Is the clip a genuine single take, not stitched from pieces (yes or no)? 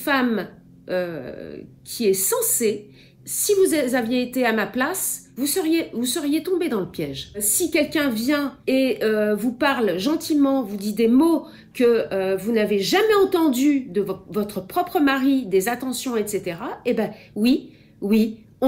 yes